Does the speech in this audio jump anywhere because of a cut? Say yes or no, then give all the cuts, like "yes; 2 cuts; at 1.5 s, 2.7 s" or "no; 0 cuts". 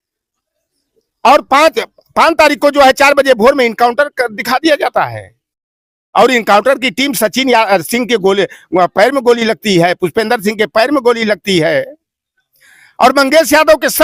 no; 0 cuts